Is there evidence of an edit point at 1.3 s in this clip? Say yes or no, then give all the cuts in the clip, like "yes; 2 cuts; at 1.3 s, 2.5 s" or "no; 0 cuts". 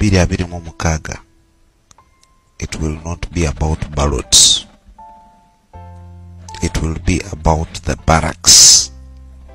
no; 3 cuts; at 4.9 s, 6.6 s, 8.8 s